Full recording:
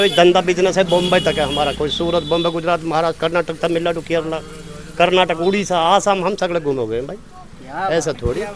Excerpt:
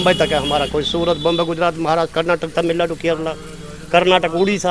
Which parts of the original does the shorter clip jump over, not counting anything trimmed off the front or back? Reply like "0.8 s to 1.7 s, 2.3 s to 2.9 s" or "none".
none